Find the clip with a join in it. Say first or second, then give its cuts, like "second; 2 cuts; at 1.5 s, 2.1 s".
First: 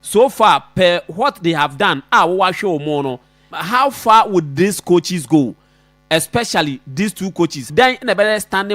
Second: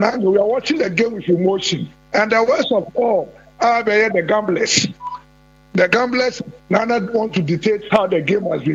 first; 2 cuts; at 3.5 s, 7.7 s